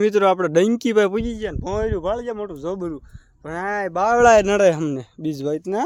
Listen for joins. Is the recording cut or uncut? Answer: uncut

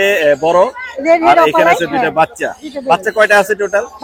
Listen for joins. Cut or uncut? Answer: uncut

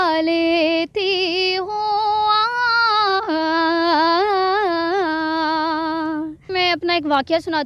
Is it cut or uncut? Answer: cut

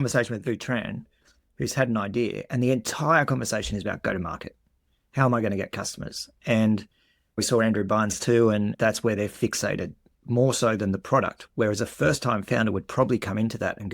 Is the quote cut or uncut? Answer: cut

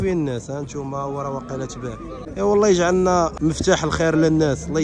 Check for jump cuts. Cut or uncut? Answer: cut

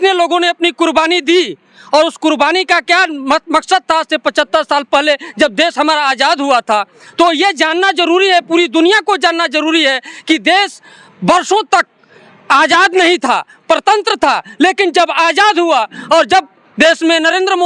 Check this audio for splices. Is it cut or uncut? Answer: uncut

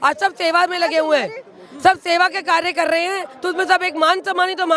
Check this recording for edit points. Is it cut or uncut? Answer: uncut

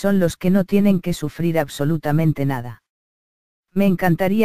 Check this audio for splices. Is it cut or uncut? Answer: uncut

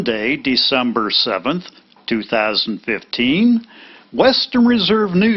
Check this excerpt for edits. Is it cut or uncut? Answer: uncut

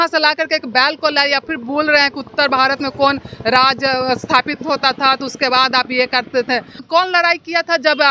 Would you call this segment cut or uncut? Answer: cut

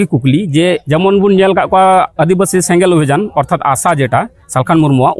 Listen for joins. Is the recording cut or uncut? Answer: uncut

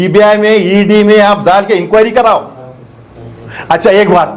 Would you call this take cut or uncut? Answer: uncut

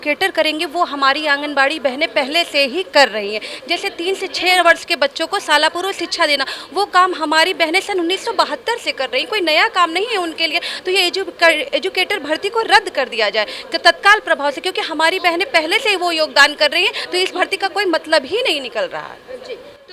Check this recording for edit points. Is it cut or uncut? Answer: uncut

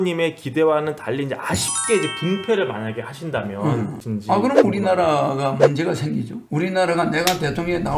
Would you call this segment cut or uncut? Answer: cut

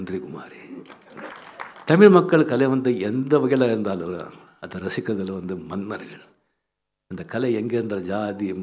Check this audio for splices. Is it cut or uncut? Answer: cut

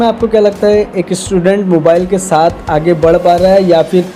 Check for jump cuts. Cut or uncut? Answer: uncut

